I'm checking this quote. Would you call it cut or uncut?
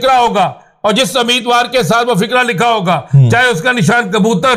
uncut